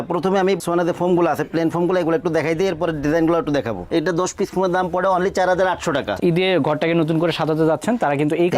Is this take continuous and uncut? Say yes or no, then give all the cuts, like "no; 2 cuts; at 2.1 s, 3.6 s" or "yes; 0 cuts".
no; 2 cuts; at 3.8 s, 6.2 s